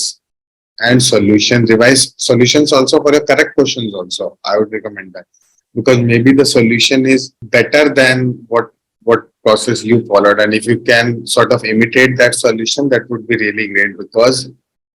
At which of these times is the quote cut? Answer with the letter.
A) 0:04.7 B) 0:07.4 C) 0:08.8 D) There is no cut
B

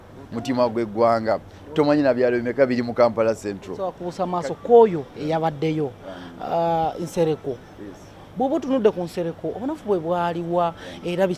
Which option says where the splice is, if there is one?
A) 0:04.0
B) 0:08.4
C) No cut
A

